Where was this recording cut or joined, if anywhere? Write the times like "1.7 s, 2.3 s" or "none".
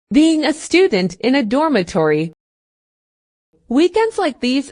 none